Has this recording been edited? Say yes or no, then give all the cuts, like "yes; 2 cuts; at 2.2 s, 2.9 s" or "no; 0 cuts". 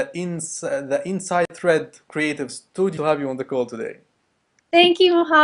no; 0 cuts